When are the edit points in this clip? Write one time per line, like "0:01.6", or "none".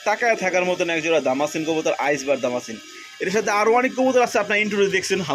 none

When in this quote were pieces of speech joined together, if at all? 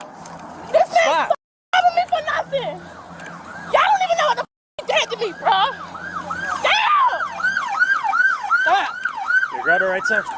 none

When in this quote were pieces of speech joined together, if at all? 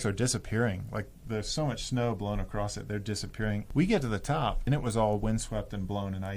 0:03.7
0:04.6

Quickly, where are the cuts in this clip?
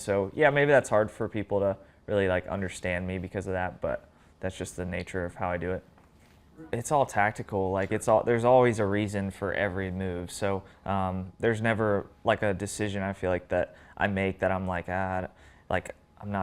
0:06.6

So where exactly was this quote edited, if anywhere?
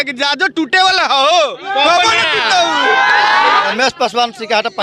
0:03.7

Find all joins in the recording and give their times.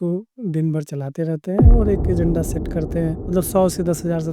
0:03.2

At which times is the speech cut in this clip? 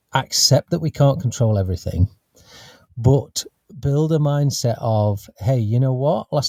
none

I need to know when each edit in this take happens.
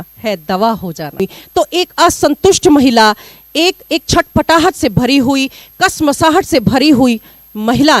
0:01.2

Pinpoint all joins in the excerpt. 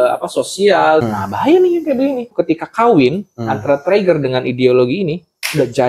0:01.1
0:02.3

